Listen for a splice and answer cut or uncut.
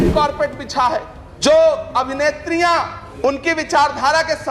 cut